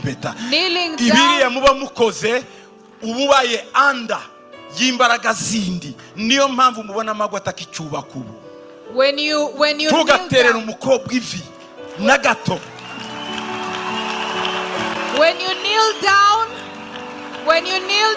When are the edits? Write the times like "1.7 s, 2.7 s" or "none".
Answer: none

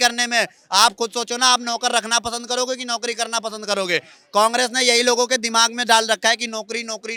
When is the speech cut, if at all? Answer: none

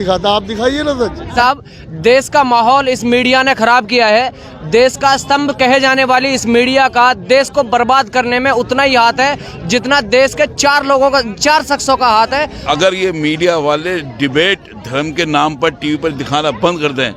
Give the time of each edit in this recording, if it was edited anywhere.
1.2 s, 12.5 s

